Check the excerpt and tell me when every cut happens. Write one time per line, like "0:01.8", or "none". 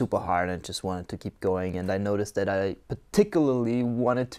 none